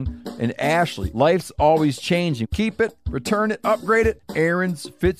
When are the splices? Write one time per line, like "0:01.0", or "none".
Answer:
0:01.0
0:02.4
0:04.2